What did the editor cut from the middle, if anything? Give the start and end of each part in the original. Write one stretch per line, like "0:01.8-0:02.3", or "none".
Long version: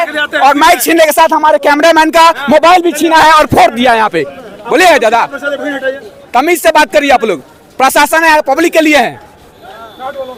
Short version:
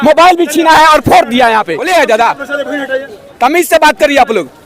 0:04.2-0:04.7